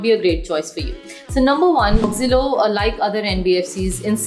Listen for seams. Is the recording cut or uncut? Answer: cut